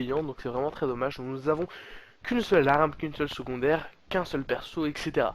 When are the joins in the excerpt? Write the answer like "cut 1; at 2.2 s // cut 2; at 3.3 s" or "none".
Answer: cut 1; at 3.2 s